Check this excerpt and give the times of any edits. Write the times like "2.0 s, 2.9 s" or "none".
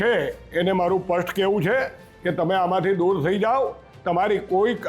none